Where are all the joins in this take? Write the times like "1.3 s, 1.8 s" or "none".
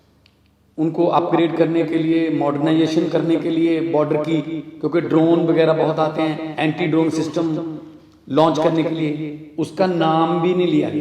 none